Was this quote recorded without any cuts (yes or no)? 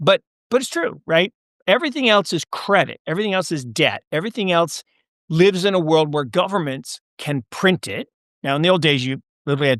yes